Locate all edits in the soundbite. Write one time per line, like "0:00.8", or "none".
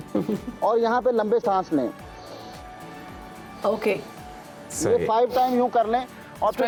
none